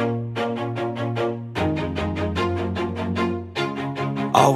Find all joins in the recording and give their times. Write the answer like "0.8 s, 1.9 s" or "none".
none